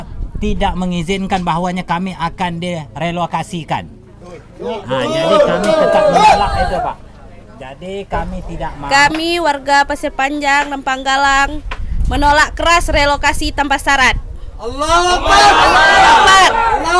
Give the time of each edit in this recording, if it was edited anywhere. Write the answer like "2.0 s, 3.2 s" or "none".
8.8 s